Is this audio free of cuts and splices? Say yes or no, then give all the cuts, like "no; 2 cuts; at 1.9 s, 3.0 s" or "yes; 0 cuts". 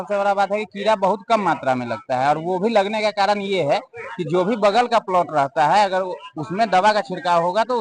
yes; 0 cuts